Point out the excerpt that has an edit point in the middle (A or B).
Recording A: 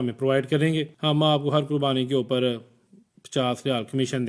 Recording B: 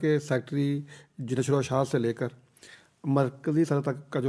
A